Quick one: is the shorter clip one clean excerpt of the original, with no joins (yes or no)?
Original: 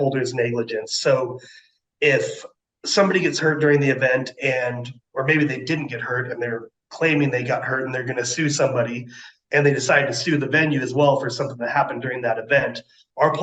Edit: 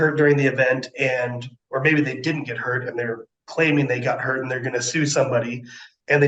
yes